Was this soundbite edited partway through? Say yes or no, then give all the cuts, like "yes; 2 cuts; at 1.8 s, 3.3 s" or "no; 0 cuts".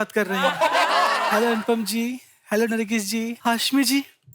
yes; 2 cuts; at 1.2 s, 3.3 s